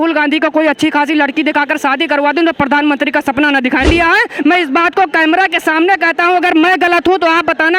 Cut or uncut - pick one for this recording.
cut